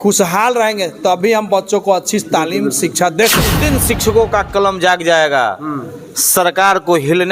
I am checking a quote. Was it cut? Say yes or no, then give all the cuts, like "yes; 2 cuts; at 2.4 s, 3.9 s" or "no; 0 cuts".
yes; 1 cut; at 3.6 s